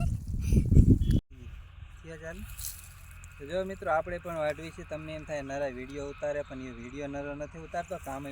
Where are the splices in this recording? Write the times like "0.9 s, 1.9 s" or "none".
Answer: 1.2 s